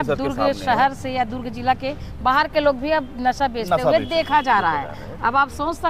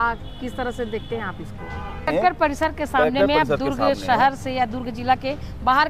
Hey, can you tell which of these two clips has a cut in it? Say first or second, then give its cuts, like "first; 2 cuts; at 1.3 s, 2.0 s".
second; 1 cut; at 2.1 s